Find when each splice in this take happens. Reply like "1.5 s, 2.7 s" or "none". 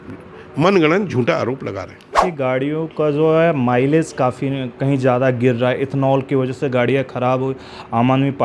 2.2 s